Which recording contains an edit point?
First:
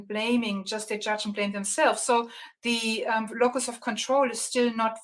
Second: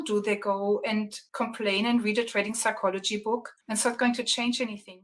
second; 2 cuts; at 1.2 s, 3.6 s

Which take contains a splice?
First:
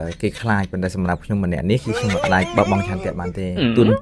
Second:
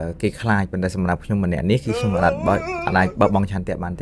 first; 1 cut; at 2.2 s

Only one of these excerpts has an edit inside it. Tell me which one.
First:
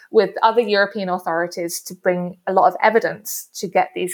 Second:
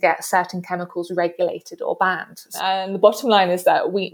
second; 1 cut; at 2.5 s

